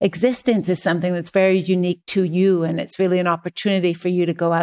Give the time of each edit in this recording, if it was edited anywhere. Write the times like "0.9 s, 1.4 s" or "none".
none